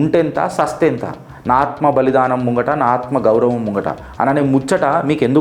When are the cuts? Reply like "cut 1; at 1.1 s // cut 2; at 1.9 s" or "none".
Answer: none